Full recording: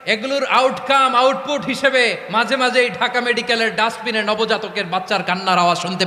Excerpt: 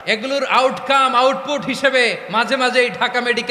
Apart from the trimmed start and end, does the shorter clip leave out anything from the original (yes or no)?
no